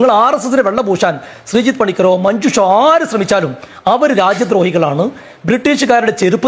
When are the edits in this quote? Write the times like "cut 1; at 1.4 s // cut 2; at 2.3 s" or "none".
none